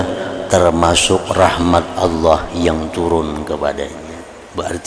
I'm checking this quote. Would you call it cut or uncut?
uncut